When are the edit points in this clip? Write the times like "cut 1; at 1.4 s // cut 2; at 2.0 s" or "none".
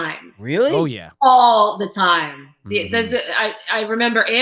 none